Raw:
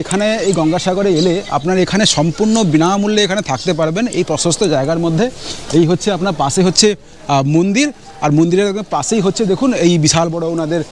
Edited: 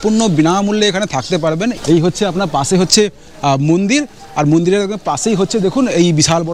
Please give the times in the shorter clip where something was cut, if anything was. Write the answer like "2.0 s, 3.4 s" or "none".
1.8 s